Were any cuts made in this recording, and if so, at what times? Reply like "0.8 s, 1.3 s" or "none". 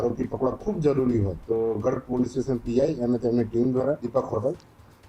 1.4 s, 4.0 s